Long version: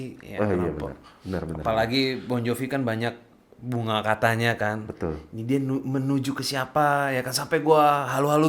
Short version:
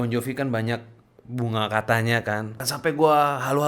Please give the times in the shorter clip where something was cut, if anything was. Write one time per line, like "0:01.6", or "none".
0:02.6